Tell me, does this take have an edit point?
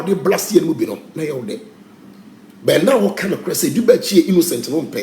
no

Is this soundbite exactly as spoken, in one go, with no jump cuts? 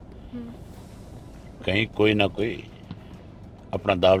yes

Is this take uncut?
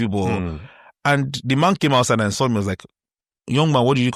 yes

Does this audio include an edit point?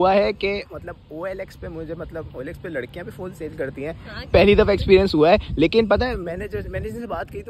no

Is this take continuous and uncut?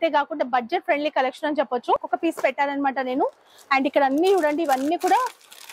no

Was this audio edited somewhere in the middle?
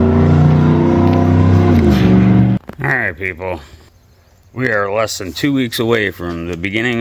no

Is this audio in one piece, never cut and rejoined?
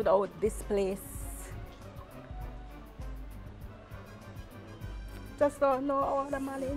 yes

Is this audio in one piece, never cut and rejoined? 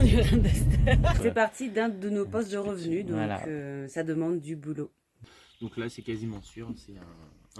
no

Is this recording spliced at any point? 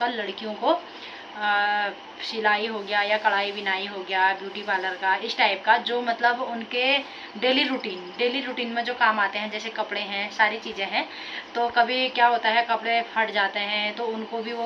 no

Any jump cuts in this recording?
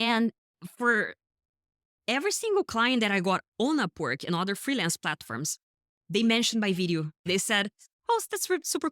yes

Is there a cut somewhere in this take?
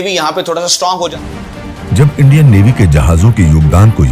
yes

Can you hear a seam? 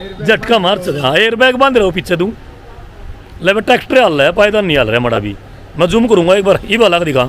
no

